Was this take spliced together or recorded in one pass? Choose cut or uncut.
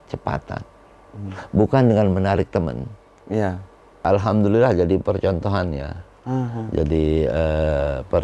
cut